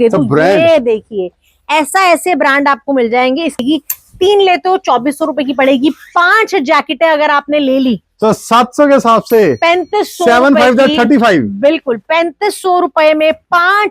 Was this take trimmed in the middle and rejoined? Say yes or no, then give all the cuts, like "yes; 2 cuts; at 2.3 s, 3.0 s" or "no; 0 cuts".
yes; 1 cut; at 3.6 s